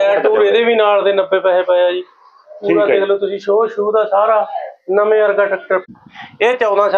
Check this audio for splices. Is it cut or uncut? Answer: cut